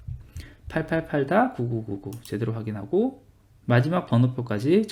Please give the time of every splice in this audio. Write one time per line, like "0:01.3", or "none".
none